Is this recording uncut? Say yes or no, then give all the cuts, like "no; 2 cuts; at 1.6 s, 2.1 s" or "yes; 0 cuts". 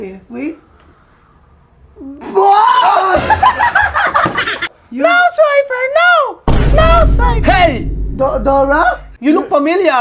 no; 2 cuts; at 4.7 s, 9.1 s